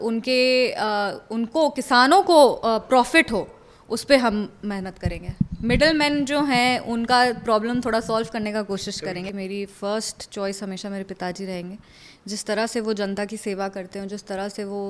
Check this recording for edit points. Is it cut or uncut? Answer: cut